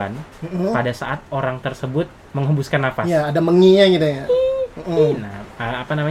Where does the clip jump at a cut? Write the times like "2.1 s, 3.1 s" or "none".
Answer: none